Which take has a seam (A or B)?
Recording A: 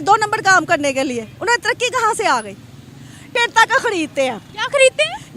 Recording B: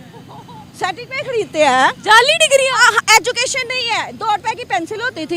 A